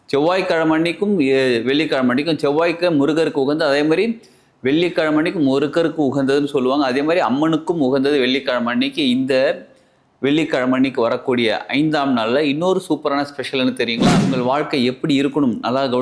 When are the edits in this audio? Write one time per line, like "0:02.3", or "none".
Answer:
0:14.3